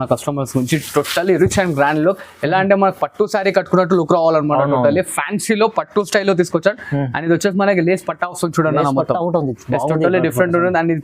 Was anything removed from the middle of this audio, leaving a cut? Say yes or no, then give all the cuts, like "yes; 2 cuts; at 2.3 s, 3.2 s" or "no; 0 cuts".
no; 0 cuts